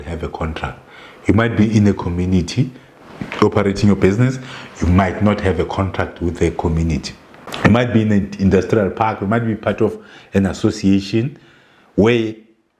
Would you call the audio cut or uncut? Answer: uncut